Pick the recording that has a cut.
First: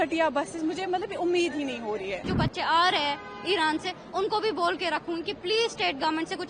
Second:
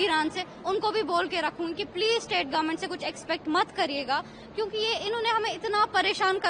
first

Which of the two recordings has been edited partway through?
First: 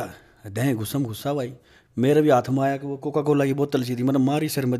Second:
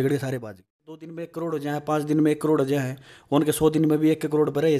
second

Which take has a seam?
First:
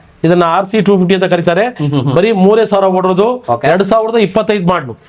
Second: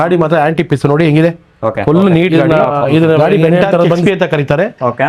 second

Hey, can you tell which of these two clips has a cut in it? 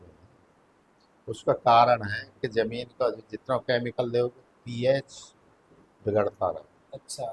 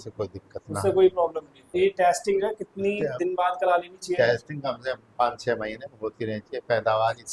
second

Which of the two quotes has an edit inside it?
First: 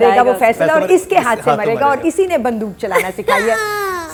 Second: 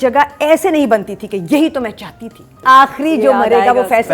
second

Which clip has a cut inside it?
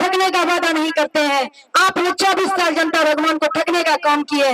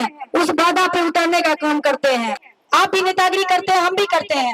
second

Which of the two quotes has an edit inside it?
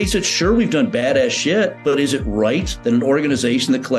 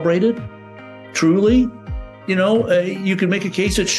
first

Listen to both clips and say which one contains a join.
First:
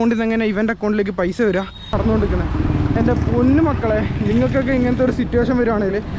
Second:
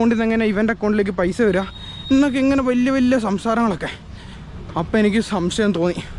first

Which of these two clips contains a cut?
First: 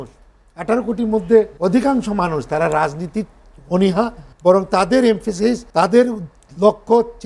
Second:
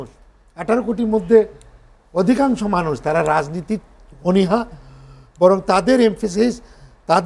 first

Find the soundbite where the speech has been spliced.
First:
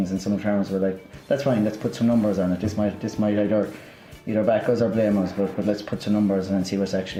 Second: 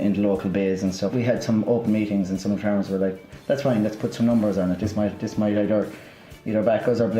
second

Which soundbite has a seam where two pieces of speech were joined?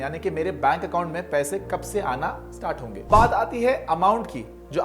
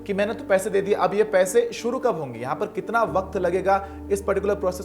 first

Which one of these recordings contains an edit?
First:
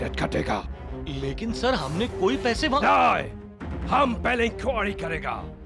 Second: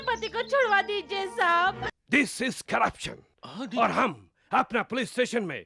second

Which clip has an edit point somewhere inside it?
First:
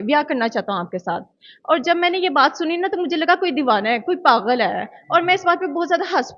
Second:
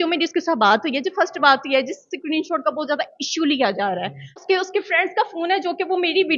second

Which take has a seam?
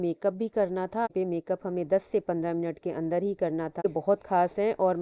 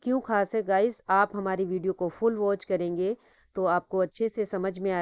first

